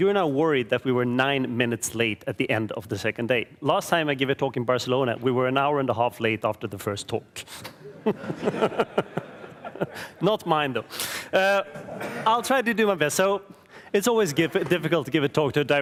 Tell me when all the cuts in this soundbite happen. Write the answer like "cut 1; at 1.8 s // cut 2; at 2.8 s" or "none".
none